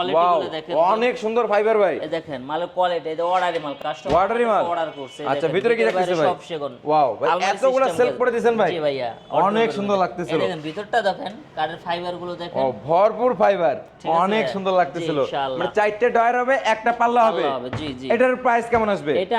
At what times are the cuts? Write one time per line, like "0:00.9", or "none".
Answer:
none